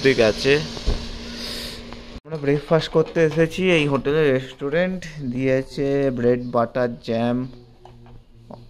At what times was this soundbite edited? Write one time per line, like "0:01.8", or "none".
0:02.2